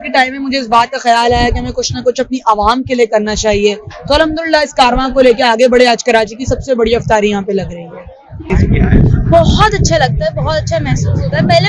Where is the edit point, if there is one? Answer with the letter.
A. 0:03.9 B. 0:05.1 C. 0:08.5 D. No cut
C